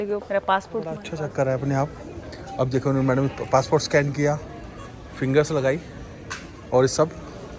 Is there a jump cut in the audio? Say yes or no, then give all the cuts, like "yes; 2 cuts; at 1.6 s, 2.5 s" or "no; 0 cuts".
yes; 1 cut; at 1.0 s